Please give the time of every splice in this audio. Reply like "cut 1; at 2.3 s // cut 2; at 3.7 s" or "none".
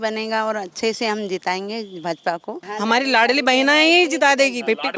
cut 1; at 2.6 s